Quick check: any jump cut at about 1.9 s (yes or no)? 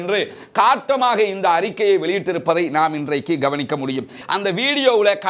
no